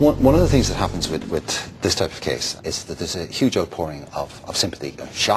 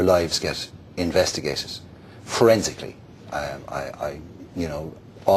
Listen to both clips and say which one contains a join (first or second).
first